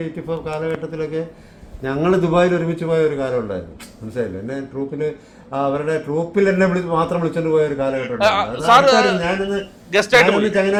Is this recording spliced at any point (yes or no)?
no